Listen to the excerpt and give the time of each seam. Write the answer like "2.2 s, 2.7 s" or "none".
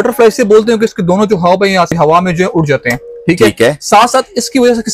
1.9 s